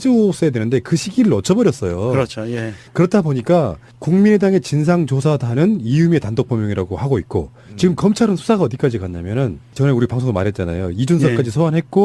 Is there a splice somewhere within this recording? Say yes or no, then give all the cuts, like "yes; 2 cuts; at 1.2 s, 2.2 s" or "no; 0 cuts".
yes; 1 cut; at 4.6 s